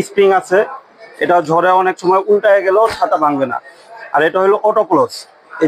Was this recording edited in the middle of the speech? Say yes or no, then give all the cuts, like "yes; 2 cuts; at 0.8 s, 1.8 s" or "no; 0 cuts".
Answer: no; 0 cuts